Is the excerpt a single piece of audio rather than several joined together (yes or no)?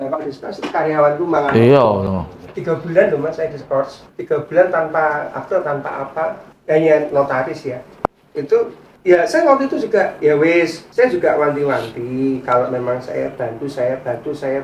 yes